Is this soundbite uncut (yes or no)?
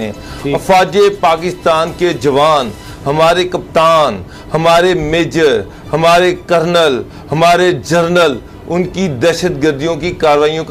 yes